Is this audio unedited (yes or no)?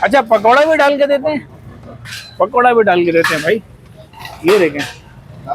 yes